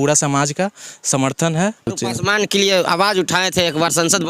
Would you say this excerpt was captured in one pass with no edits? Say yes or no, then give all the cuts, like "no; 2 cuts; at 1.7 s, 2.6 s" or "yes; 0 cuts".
no; 1 cut; at 1.9 s